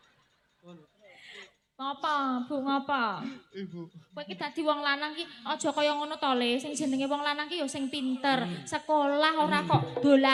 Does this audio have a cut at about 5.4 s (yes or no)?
no